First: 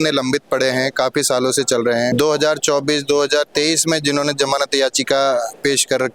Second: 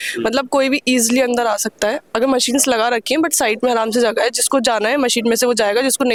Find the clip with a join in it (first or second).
first